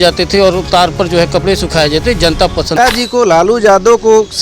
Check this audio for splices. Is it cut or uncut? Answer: cut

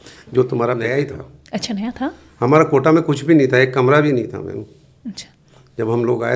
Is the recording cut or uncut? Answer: cut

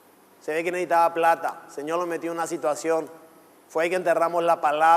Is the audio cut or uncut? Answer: cut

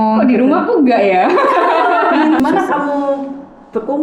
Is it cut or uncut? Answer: cut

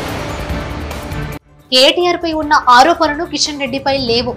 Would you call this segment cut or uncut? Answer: cut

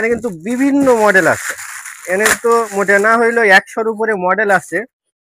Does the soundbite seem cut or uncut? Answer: uncut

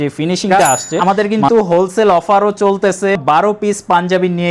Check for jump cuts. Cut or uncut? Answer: cut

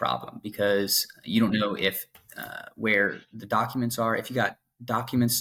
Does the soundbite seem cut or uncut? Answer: uncut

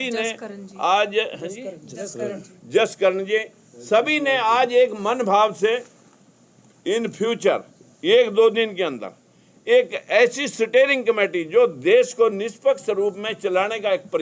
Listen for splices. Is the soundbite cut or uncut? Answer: uncut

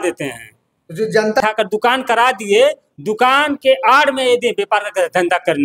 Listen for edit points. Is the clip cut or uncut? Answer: cut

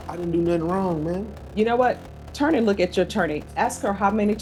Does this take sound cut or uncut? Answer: uncut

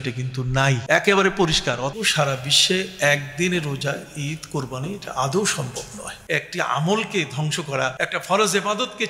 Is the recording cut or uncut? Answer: cut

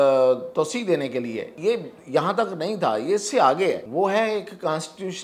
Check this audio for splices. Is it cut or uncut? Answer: cut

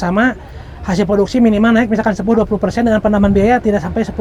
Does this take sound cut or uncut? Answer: uncut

